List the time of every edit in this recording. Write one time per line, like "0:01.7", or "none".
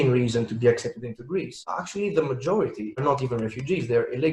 none